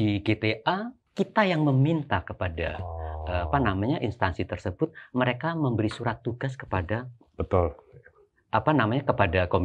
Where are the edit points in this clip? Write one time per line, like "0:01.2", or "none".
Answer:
0:01.0